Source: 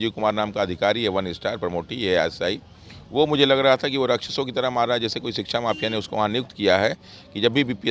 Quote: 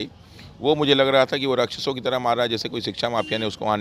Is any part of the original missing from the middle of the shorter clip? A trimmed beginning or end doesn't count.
no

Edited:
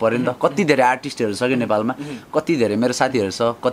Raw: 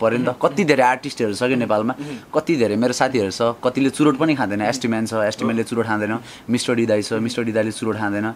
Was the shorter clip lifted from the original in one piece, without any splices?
yes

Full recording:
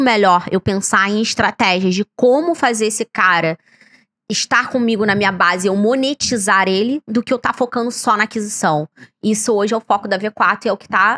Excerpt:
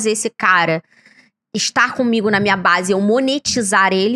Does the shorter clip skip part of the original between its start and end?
no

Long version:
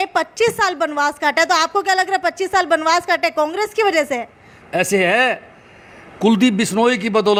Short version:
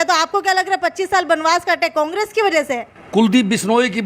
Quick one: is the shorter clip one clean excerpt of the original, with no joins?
no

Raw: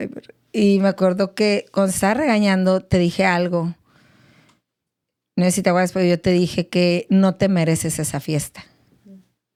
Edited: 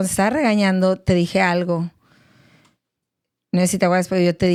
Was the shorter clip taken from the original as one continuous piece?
yes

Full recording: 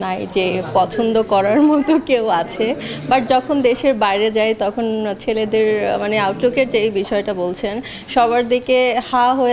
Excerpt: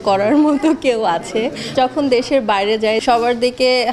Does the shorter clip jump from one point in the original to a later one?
yes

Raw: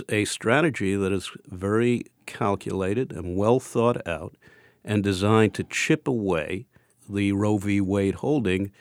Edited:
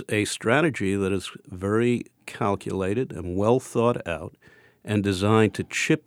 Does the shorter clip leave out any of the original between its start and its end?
no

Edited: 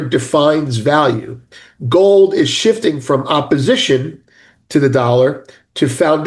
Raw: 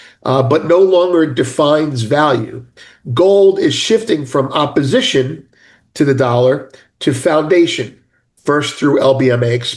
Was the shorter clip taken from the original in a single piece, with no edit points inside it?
yes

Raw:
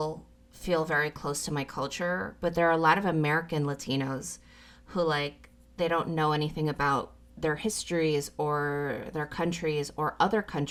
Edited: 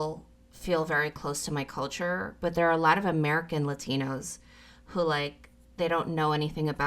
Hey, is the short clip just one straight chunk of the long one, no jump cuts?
yes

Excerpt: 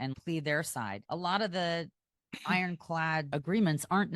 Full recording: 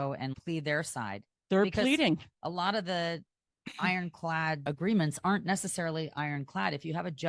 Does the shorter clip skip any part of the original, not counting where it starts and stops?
yes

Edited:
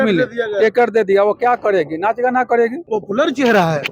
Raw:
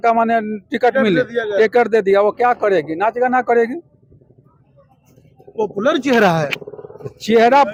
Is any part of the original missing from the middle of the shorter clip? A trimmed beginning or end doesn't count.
yes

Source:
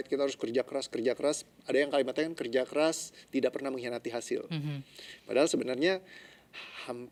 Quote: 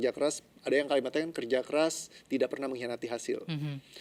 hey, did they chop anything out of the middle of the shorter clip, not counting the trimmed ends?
no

